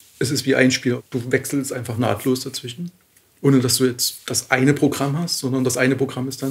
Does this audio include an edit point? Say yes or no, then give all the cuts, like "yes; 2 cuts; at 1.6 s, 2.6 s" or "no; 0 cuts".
yes; 1 cut; at 1.0 s